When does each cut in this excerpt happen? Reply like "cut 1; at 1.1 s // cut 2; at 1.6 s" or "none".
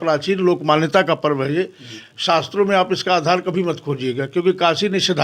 none